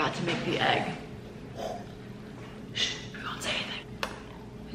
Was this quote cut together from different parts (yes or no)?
yes